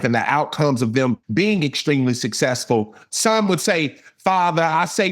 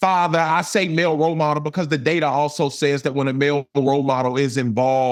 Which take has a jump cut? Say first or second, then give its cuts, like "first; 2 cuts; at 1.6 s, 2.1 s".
first; 2 cuts; at 1.2 s, 3.0 s